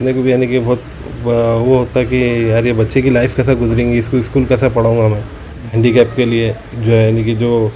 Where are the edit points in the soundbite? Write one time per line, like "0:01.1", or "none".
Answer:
0:05.6

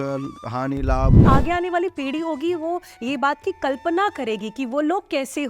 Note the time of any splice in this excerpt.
0:01.2

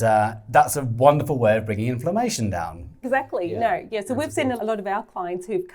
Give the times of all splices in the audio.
0:03.0
0:04.6

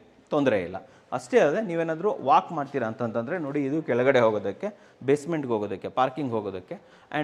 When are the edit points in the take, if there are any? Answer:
none

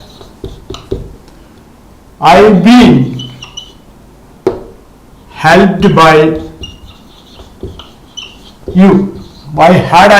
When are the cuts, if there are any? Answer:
none

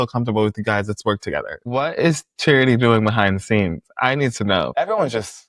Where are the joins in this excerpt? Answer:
0:01.7
0:04.7

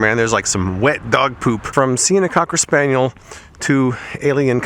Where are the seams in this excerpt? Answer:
0:01.7

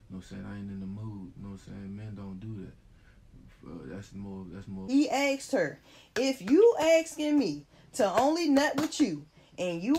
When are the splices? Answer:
0:04.8

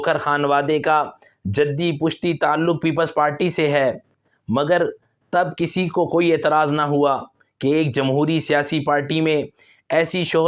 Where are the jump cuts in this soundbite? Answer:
none

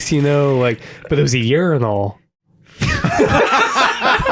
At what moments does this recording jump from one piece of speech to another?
none

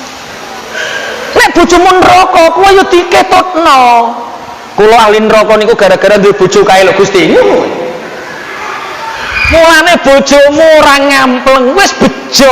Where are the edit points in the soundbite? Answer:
0:09.5

